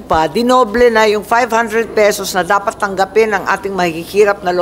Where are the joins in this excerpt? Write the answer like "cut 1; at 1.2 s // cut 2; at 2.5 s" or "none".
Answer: none